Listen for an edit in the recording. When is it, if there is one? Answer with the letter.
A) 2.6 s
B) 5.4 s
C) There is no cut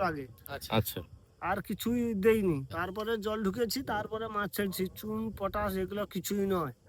A